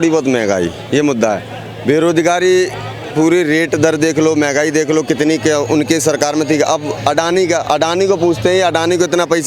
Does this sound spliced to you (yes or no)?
no